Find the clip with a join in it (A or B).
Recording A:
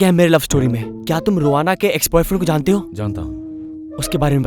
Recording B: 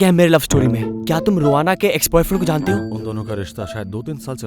B